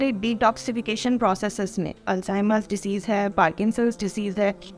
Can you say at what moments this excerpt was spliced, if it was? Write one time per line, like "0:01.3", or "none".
0:02.1